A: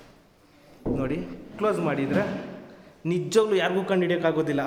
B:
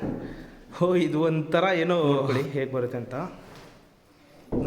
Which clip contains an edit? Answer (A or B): B